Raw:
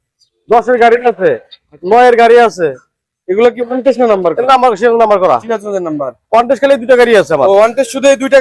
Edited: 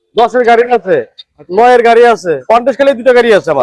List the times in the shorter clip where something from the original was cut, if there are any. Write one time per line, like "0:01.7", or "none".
0:02.4